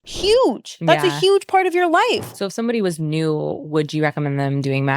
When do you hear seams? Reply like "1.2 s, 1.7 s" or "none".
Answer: 2.3 s